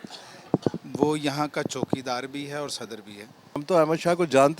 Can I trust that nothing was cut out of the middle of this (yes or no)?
no